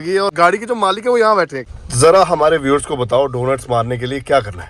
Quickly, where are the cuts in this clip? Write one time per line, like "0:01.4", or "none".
0:01.6